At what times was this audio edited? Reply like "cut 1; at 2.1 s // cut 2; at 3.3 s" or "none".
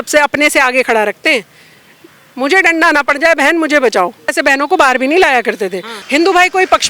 cut 1; at 4.3 s // cut 2; at 5.9 s